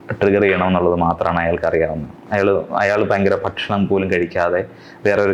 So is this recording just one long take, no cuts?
yes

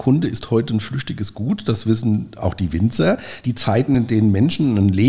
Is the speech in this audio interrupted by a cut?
no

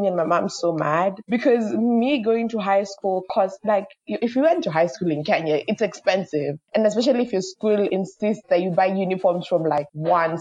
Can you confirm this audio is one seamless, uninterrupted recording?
yes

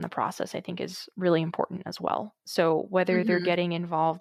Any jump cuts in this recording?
no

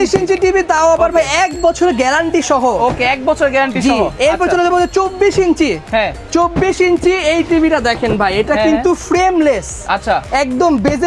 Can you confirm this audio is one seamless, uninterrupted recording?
yes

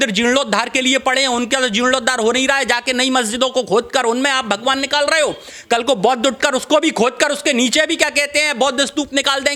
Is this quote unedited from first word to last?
yes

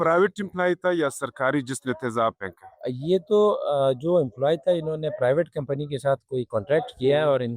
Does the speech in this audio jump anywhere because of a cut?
no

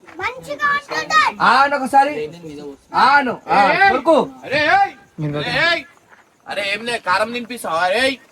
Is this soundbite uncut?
yes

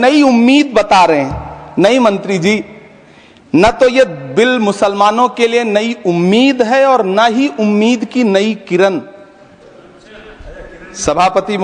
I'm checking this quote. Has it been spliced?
no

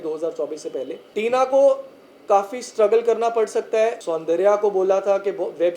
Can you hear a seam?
yes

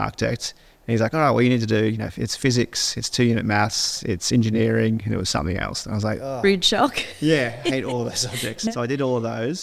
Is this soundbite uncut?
no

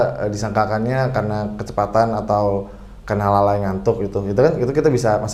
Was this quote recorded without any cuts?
yes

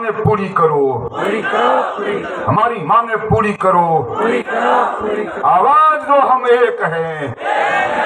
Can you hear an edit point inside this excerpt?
no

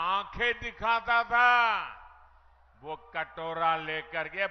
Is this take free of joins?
yes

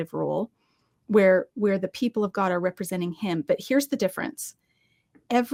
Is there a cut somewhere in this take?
no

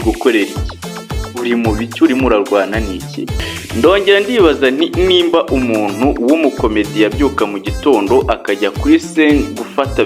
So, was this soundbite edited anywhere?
yes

